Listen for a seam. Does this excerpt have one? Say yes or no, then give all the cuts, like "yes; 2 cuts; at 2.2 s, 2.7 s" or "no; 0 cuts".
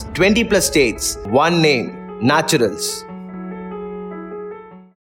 no; 0 cuts